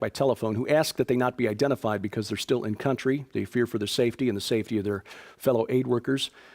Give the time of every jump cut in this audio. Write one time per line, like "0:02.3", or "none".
0:05.2